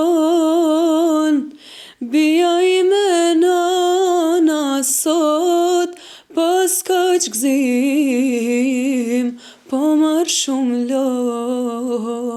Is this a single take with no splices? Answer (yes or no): yes